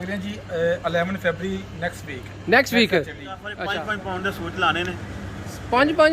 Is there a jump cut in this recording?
yes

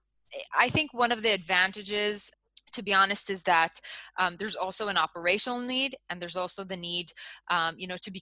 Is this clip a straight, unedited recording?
no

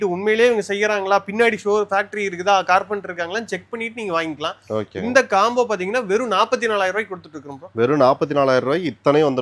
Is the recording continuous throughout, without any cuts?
yes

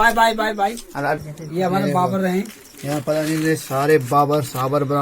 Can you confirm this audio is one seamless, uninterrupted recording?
no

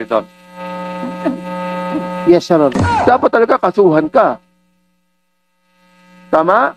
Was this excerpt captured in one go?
no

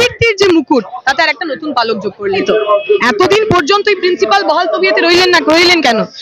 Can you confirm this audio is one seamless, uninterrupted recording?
no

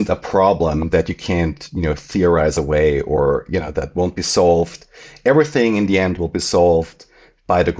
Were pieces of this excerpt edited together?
no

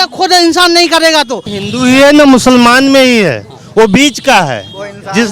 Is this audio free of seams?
no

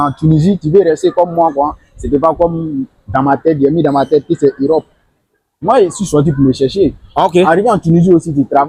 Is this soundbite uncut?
yes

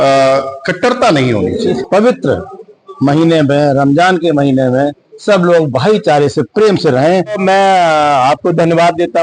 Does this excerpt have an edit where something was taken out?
yes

